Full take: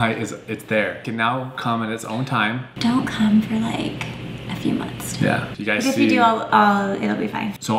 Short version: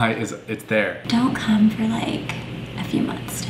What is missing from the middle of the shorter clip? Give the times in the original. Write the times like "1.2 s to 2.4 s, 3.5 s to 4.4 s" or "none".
1.0 s to 2.7 s